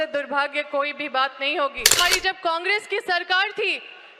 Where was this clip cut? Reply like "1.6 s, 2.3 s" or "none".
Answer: 1.9 s